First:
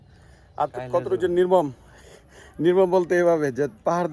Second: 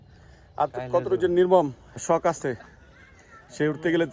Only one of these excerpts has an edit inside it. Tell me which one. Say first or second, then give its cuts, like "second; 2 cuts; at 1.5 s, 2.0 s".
second; 1 cut; at 2.0 s